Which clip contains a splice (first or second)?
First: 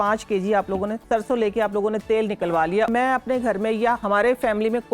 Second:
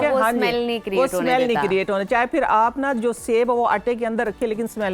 first